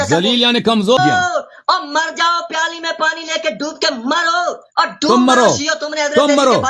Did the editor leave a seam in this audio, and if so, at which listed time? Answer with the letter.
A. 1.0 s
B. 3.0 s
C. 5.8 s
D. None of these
A